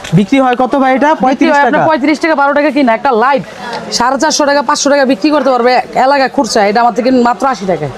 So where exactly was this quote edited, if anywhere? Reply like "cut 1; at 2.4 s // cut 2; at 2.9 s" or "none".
none